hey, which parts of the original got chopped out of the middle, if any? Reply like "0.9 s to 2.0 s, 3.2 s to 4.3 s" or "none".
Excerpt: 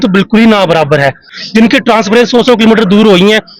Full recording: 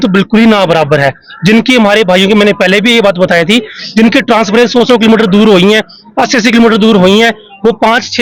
1.3 s to 3.7 s